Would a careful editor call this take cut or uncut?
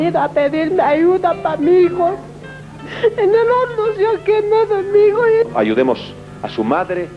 uncut